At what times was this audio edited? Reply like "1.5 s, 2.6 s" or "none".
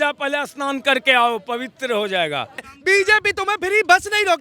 2.7 s